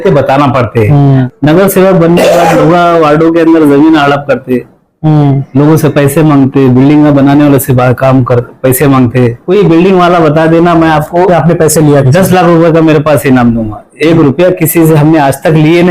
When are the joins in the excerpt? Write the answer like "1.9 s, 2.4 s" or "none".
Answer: 1.3 s, 9.4 s